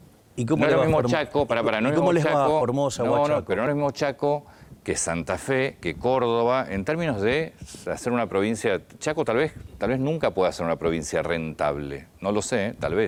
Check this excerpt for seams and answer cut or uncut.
uncut